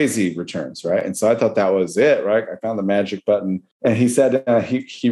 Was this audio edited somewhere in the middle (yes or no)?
yes